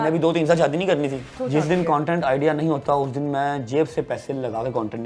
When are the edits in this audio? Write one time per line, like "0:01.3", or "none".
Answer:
0:01.4